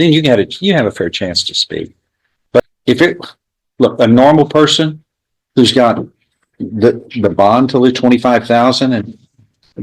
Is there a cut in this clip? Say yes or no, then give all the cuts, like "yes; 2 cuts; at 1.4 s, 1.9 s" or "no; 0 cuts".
yes; 1 cut; at 2.6 s